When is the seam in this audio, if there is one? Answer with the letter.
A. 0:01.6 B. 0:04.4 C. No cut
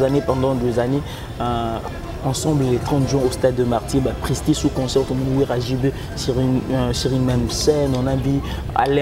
C